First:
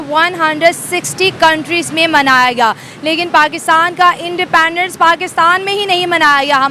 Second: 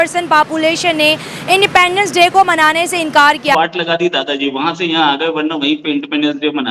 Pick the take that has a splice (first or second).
second